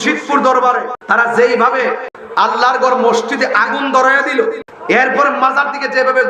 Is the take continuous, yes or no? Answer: no